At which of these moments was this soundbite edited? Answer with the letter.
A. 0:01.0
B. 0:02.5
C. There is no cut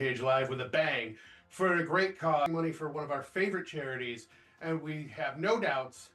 B